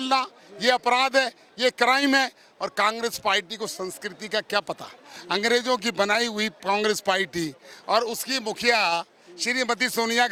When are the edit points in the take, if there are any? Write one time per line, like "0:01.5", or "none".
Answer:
none